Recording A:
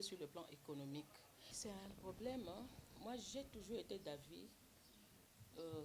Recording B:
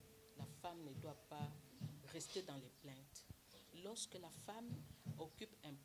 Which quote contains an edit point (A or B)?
A